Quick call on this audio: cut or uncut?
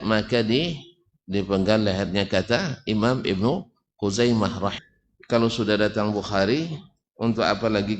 cut